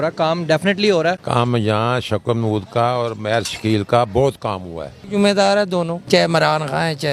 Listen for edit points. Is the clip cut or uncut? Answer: cut